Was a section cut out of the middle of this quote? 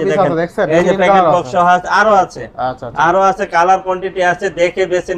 no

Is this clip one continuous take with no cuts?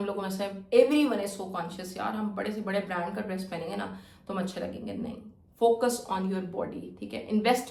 yes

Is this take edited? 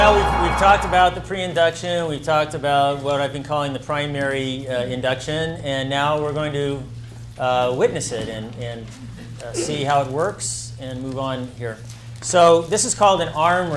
yes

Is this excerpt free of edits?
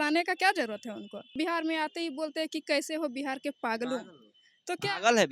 no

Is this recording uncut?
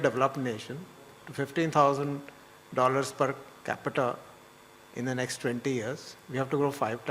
yes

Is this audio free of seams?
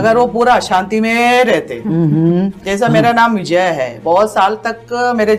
yes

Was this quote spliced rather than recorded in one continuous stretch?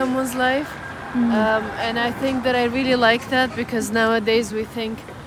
no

